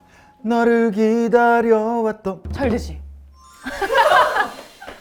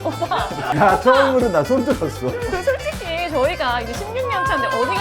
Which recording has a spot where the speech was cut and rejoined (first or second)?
second